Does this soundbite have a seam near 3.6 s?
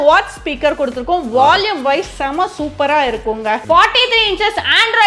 yes; 1 cut; at 3.6 s

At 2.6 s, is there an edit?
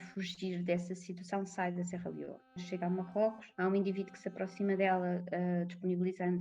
yes; 2 cuts; at 2.6 s, 3.4 s

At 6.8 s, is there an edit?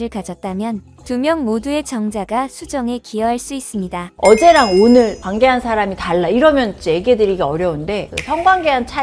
no; 1 cut; at 4.1 s

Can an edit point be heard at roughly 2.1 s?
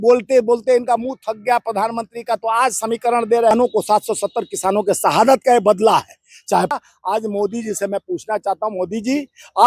no; 2 cuts; at 3.5 s, 6.7 s

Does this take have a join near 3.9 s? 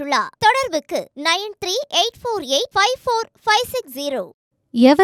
no; 0 cuts

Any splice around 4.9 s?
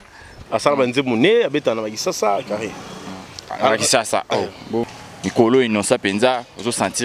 yes; 1 cut; at 4.9 s

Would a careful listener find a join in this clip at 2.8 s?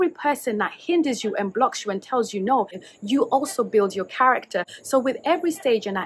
yes; 1 cut; at 2.8 s

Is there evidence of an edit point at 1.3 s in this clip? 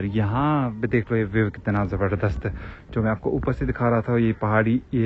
no; 0 cuts

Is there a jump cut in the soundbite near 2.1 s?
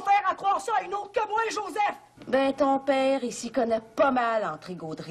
yes; 1 cut; at 2.1 s

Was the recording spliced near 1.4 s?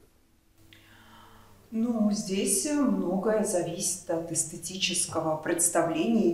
no; 0 cuts

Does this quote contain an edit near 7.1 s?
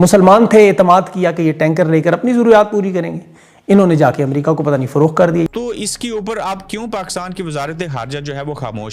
no; 1 cut; at 5.5 s

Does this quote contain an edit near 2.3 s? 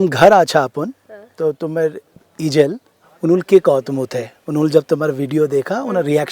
yes; 2 cuts; at 2.3 s, 3.0 s

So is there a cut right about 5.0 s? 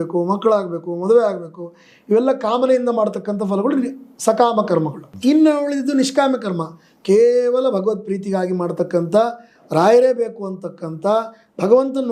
yes; 1 cut; at 5.0 s

